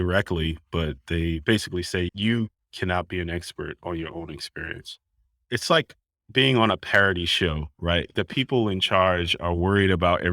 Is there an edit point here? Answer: yes; 3 cuts; at 2.1 s, 5.4 s, 8.1 s

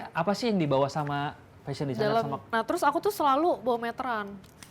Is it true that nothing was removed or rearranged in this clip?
no; 1 cut; at 2.5 s

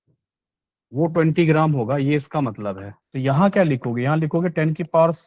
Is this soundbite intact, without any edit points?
no; 1 cut; at 2.9 s

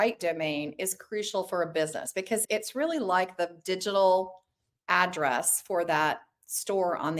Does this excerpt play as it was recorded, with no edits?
yes; 0 cuts

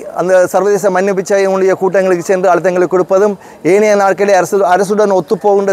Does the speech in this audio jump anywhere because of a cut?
no; 0 cuts

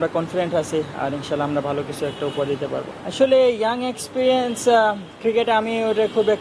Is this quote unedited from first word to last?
yes; 0 cuts

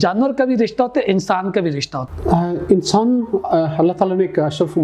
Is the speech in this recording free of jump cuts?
no; 1 cut; at 2.0 s

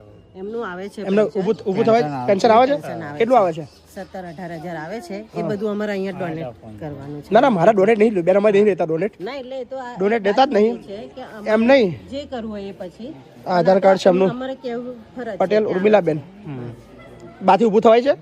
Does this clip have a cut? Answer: no; 0 cuts

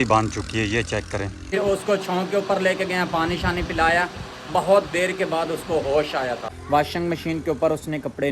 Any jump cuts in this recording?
yes; 2 cuts; at 1.5 s, 6.5 s

